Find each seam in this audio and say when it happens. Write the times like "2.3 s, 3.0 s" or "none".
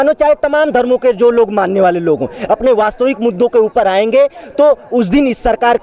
none